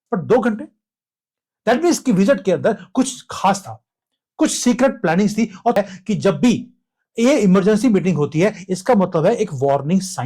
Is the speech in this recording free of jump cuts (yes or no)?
no